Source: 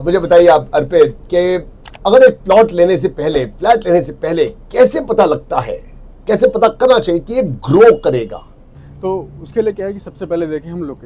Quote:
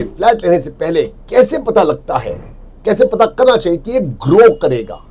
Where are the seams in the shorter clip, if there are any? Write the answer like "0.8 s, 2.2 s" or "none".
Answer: none

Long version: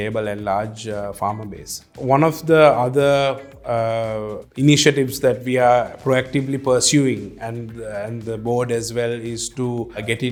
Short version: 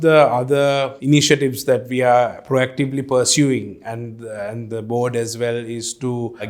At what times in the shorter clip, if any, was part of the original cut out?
0.9 s

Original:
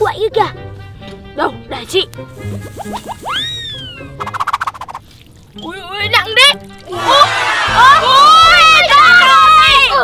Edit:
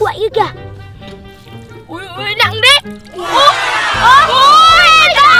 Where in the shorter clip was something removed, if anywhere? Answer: 1.2 s

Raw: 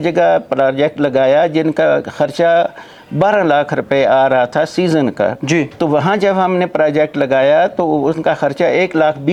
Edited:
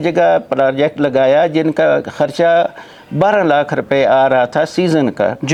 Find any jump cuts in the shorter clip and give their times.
none

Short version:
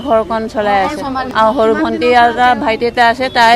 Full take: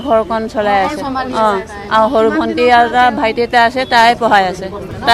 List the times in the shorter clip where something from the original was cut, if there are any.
1.2 s

